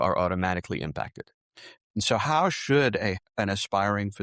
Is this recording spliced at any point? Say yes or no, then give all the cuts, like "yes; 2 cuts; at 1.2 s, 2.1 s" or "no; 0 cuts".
yes; 2 cuts; at 1.8 s, 3.2 s